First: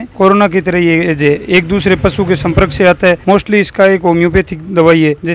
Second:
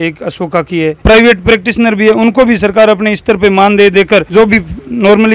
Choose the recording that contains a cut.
second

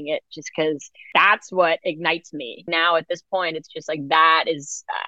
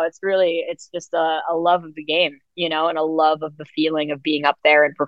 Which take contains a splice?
first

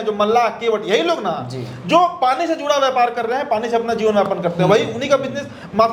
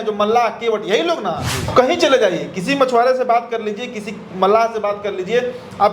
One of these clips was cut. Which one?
second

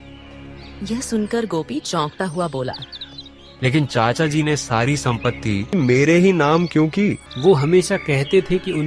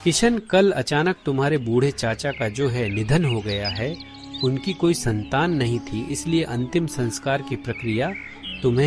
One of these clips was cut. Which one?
first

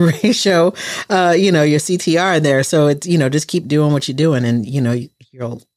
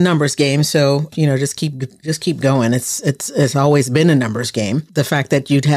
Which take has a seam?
second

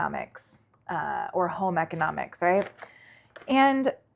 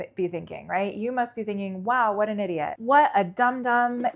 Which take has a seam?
second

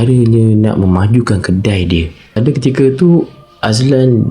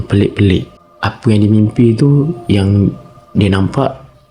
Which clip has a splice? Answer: first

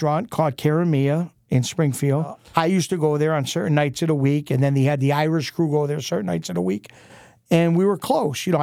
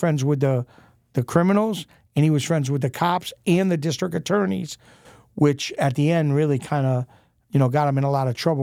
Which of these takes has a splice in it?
first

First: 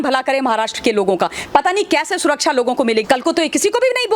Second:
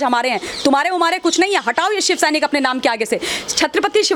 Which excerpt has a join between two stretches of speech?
first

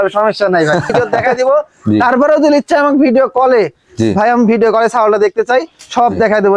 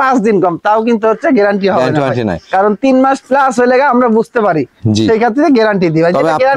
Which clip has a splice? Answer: first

